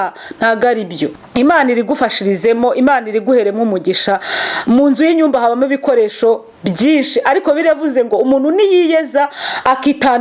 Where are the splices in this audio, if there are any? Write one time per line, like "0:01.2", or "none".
0:01.2